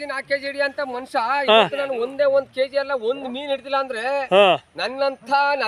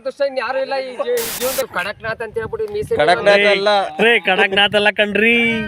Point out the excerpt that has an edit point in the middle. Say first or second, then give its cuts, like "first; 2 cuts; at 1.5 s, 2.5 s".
second; 1 cut; at 1.7 s